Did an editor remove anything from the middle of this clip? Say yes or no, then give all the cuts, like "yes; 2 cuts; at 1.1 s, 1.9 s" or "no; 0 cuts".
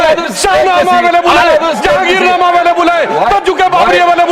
no; 0 cuts